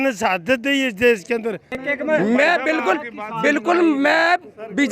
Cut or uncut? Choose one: cut